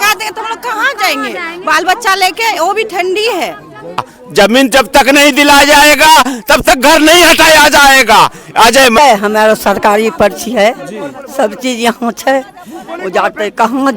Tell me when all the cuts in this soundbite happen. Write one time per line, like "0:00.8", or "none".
0:04.2
0:09.0